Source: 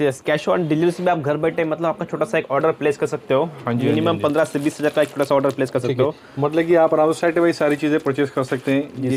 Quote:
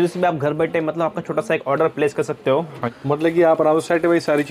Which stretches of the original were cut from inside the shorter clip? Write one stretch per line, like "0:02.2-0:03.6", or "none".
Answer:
0:03.7-0:06.2